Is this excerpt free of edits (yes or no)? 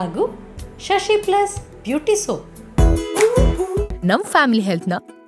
no